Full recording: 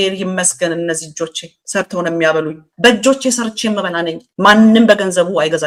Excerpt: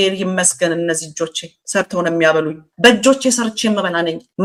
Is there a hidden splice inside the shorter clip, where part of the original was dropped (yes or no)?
no